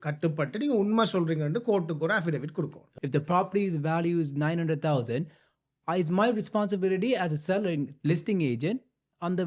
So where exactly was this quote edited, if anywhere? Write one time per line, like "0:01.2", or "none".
0:02.9